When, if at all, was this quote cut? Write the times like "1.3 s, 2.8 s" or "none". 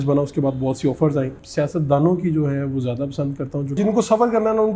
1.4 s, 3.8 s